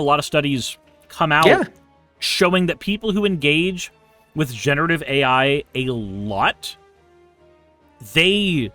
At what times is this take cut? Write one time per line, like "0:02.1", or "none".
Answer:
none